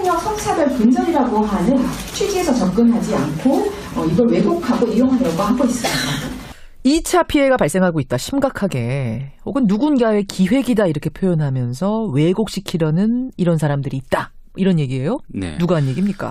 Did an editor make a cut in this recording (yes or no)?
yes